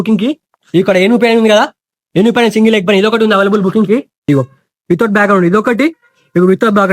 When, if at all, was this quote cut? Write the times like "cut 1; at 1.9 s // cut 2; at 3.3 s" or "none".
cut 1; at 4.1 s